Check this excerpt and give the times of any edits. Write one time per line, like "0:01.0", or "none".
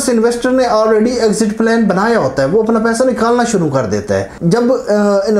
0:04.3